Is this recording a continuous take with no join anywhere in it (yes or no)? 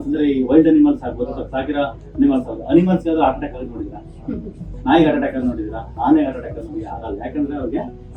yes